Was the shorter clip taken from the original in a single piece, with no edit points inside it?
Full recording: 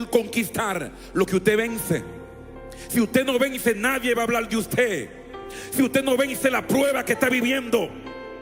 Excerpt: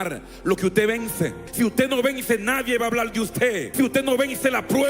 no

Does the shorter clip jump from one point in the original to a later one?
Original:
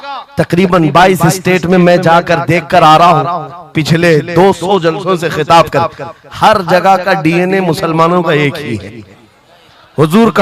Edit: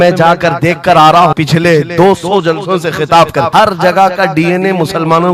yes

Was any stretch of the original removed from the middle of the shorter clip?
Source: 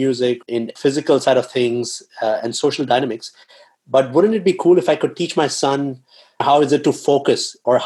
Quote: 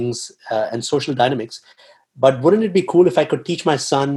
no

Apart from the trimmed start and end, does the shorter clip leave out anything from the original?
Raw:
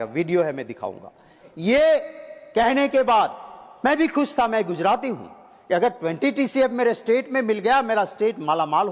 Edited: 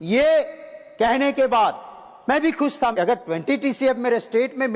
yes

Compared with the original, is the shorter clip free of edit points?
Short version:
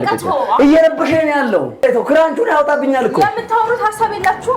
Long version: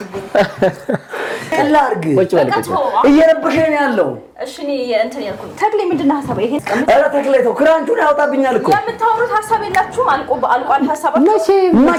no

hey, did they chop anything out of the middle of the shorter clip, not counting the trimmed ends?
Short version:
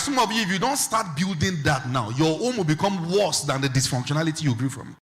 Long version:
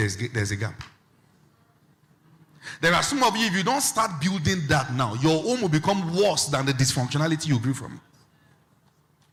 no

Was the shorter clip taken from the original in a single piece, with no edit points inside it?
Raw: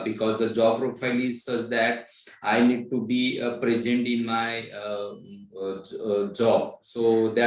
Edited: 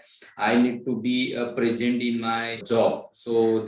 no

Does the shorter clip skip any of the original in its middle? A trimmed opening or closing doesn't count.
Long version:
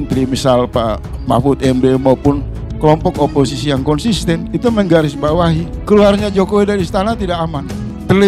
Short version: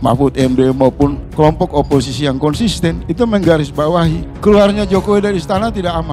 yes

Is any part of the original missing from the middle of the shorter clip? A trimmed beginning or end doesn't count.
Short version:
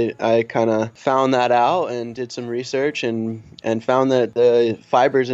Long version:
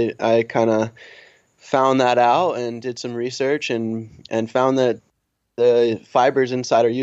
yes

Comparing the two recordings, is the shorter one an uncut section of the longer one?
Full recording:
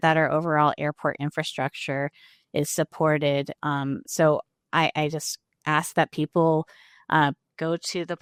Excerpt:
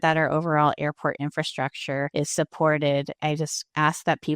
no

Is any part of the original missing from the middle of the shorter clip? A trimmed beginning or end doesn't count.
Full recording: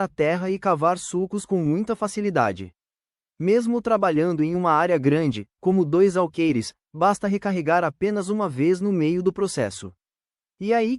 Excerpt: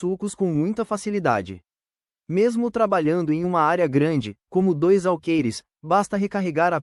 no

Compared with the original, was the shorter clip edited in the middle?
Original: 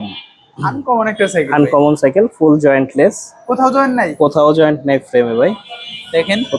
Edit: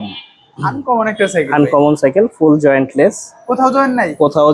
no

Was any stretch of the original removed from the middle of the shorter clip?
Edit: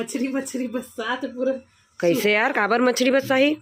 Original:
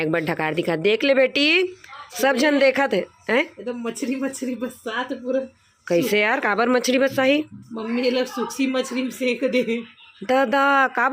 no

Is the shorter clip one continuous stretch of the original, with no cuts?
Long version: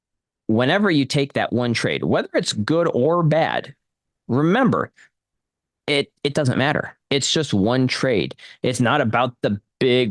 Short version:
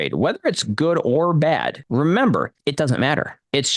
no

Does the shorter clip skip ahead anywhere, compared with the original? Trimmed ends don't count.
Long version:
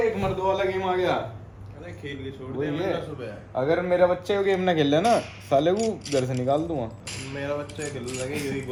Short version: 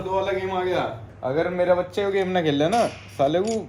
yes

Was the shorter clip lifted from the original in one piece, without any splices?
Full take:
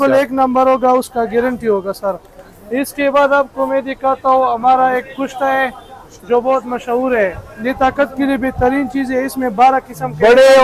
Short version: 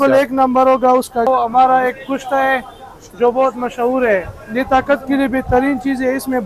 no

